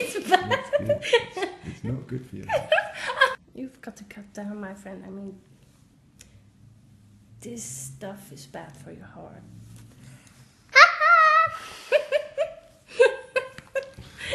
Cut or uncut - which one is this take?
uncut